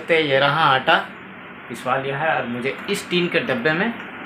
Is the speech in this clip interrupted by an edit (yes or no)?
no